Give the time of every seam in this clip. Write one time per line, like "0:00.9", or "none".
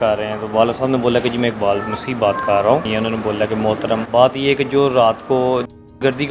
0:02.9
0:04.0